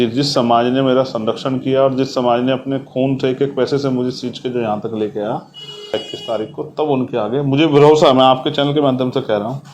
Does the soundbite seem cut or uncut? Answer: cut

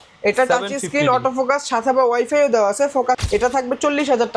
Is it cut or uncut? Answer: cut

